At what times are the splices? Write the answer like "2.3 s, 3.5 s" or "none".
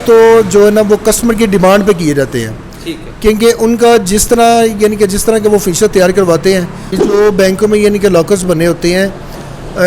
7.0 s